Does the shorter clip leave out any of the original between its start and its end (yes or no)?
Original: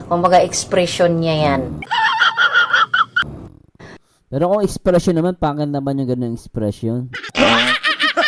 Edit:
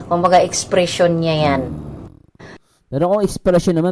yes